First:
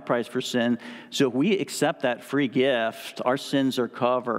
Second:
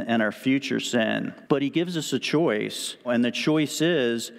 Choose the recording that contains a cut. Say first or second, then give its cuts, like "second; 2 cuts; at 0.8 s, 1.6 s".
second; 2 cuts; at 1.4 s, 3.1 s